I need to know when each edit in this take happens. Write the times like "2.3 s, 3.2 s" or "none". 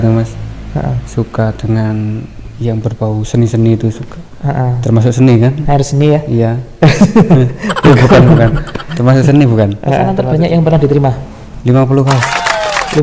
10.0 s